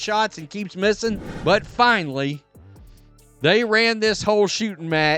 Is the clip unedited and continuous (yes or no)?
no